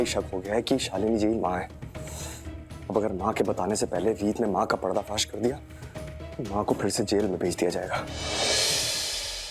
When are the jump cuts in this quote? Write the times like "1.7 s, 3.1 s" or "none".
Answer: 8.4 s